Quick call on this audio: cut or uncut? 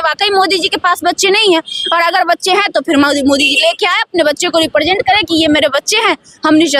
uncut